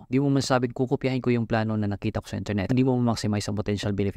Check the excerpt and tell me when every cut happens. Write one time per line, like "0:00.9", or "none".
0:02.7